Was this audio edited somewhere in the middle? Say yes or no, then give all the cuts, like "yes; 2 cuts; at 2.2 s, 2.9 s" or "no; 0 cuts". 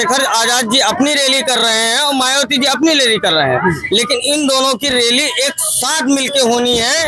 no; 0 cuts